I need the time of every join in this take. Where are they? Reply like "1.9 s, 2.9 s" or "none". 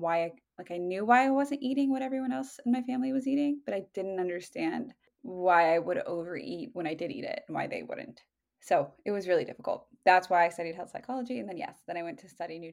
none